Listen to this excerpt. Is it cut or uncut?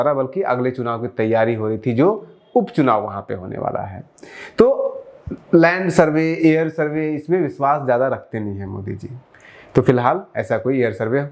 uncut